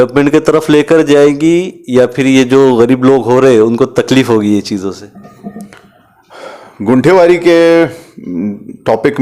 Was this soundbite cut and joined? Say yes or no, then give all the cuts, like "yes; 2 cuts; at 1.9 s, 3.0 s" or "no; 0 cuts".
no; 0 cuts